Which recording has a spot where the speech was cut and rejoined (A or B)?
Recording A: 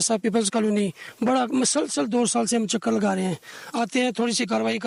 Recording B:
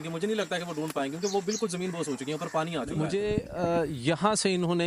B